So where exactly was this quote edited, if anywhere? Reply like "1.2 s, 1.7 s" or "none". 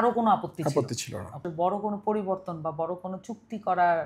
1.4 s